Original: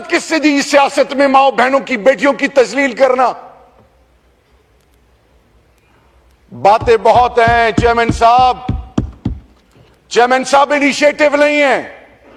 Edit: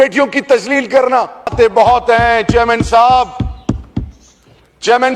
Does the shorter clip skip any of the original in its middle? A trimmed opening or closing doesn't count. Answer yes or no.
yes